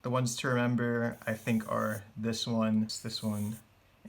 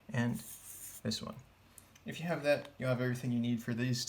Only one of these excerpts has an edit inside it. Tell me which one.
first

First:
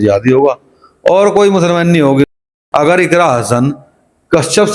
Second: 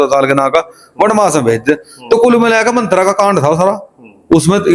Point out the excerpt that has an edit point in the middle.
first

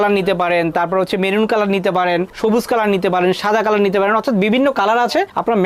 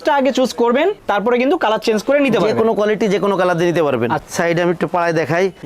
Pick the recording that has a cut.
second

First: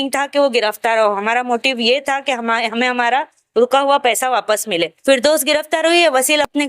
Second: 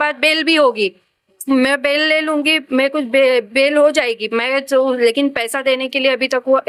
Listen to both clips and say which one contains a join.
first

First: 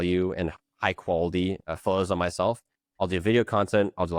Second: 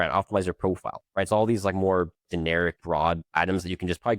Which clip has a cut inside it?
second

